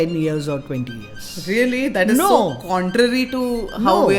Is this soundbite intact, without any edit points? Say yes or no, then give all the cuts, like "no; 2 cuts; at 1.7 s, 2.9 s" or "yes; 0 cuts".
yes; 0 cuts